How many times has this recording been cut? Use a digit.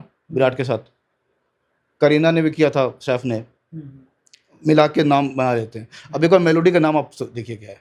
0